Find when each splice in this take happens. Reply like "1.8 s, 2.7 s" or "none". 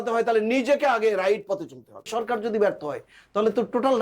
2.1 s